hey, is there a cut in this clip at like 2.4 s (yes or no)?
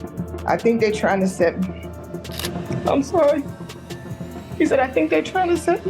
yes